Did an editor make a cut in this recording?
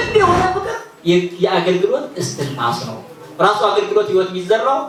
no; 0 cuts

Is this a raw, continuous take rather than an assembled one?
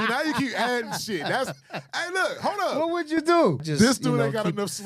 no; 1 cut; at 3.6 s

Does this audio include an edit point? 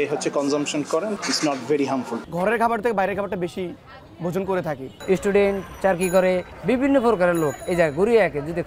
yes; 5 cuts; at 1.2 s, 2.2 s, 4.9 s, 6.5 s, 7.6 s

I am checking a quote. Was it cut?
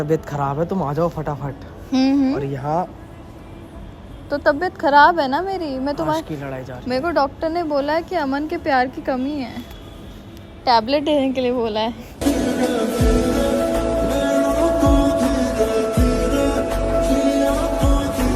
no; 0 cuts

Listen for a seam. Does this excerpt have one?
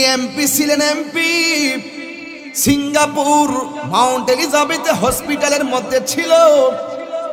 no; 0 cuts

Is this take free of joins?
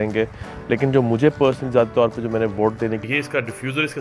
no; 1 cut; at 3.1 s

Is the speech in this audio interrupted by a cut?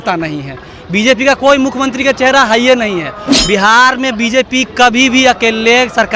no; 0 cuts

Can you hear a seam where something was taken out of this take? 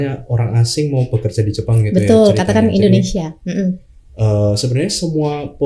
no; 0 cuts

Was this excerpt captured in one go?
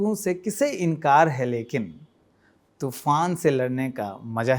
yes; 0 cuts

